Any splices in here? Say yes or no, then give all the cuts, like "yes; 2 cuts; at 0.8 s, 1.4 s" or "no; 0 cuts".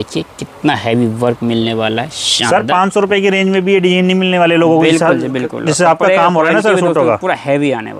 no; 0 cuts